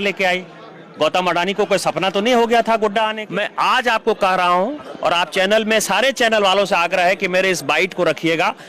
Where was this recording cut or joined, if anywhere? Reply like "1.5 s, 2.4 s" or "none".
3.2 s